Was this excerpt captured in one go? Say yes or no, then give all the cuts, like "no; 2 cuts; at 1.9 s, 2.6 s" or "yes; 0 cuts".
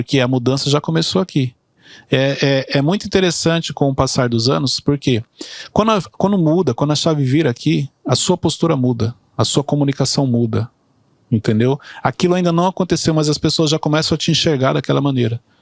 yes; 0 cuts